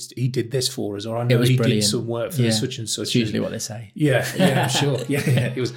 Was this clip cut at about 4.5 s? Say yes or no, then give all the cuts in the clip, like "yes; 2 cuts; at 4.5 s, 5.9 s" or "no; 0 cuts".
no; 0 cuts